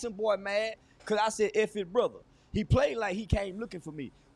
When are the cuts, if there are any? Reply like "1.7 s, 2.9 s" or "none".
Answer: none